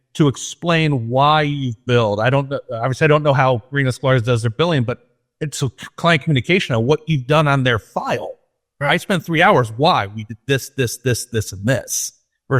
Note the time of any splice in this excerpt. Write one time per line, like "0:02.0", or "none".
none